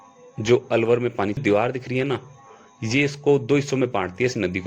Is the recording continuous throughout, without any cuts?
no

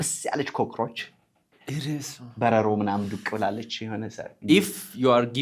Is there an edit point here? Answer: yes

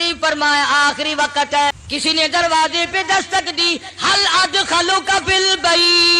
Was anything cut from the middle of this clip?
yes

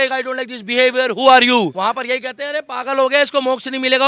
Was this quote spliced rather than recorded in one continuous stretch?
no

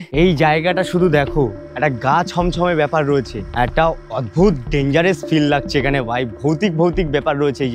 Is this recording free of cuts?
no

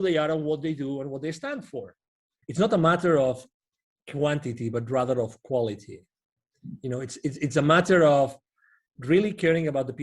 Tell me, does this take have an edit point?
yes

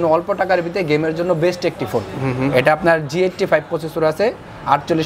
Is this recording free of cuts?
yes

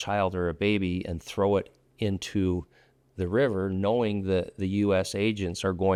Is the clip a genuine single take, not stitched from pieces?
yes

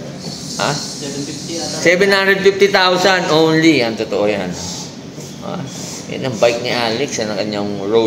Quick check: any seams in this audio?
no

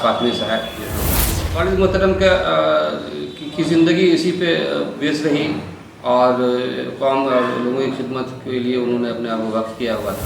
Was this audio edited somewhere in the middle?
yes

